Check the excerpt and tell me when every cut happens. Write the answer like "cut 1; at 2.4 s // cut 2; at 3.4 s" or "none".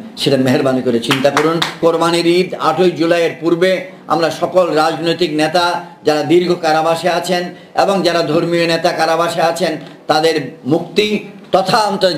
cut 1; at 1.8 s